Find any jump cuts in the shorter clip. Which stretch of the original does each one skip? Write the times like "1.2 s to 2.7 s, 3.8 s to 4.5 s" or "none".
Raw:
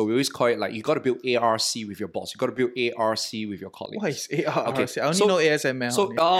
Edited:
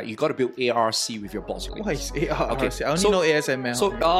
2.3 s to 3.8 s